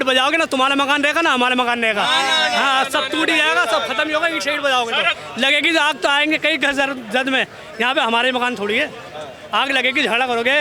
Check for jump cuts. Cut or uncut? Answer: cut